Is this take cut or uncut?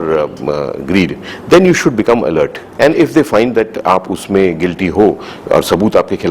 cut